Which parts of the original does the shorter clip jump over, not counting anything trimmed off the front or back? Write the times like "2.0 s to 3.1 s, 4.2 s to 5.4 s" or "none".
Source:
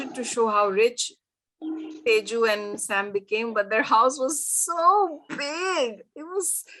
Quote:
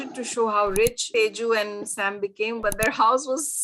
1.0 s to 1.9 s